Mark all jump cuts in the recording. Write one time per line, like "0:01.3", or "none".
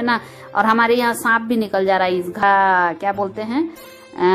0:02.4